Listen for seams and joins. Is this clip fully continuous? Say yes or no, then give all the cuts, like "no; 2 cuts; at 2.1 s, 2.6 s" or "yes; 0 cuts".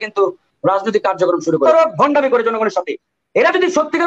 no; 1 cut; at 1.6 s